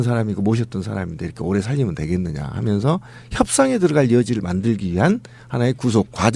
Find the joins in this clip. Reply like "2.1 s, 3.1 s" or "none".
1.7 s